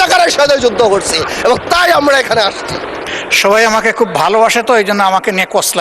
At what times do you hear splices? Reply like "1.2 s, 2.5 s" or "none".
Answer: 3.1 s